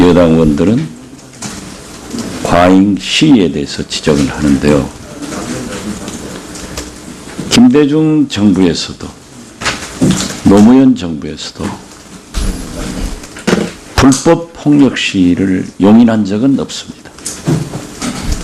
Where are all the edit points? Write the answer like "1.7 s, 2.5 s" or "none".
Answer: none